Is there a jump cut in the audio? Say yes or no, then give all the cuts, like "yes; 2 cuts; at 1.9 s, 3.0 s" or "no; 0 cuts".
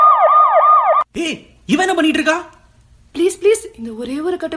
yes; 1 cut; at 1.0 s